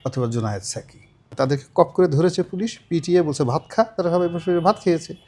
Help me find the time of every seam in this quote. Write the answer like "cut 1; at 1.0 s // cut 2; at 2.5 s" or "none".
cut 1; at 1.2 s